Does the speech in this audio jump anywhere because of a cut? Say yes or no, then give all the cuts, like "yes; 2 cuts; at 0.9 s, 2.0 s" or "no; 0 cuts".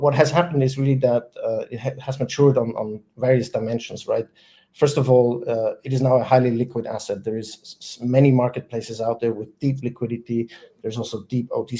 no; 0 cuts